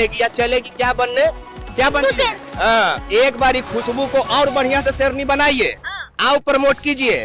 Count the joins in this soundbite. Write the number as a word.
one